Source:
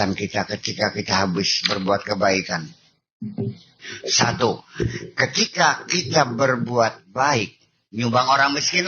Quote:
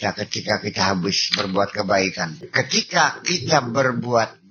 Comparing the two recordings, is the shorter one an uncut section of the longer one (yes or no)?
no